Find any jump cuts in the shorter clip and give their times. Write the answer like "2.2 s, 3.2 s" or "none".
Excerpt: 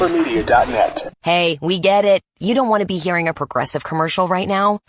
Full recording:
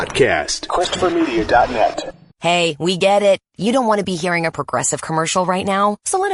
1.1 s